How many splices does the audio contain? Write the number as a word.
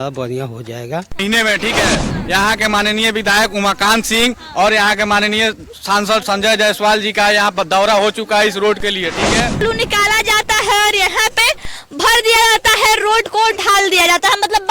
two